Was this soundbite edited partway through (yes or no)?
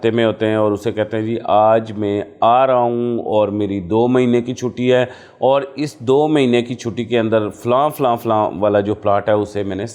no